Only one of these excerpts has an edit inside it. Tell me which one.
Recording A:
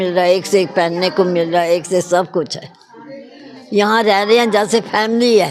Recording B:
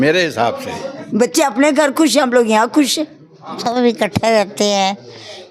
B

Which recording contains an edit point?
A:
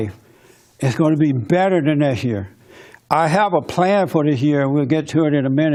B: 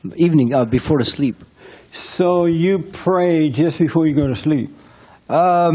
B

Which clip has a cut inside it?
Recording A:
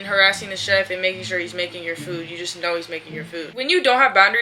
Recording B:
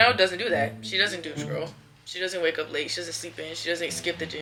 A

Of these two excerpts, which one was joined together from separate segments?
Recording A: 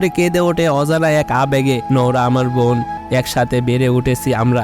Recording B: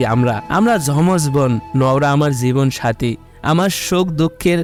A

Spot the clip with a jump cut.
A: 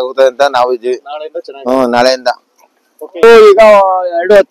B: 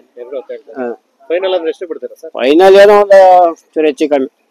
A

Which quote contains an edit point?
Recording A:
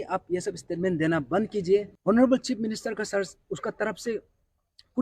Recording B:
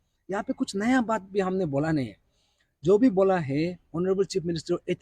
A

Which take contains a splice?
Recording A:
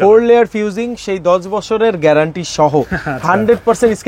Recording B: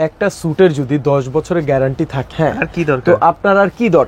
B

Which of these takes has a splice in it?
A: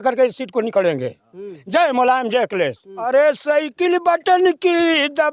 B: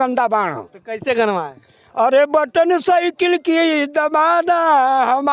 A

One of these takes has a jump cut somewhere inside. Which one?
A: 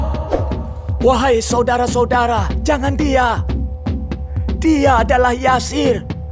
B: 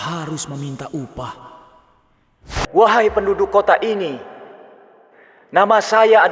B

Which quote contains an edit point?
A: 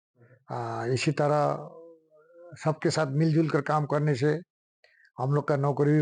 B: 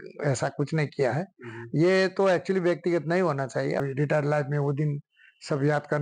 B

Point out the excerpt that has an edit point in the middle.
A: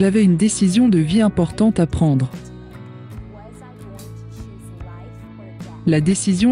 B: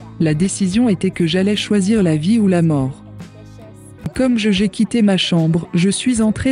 B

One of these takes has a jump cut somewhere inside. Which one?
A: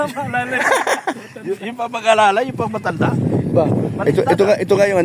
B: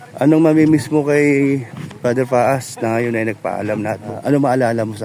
B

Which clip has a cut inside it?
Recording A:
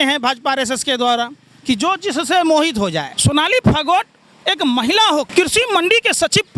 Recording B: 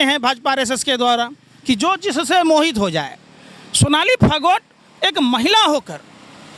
A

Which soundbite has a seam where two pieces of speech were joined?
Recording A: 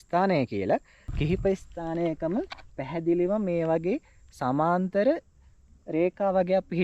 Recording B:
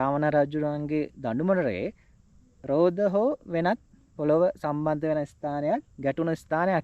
A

